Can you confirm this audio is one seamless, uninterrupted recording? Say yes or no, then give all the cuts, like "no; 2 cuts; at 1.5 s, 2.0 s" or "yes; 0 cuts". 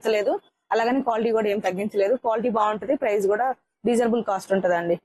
yes; 0 cuts